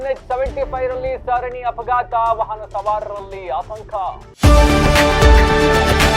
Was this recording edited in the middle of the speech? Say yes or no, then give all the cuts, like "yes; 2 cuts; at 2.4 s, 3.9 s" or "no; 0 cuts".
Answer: yes; 1 cut; at 4.3 s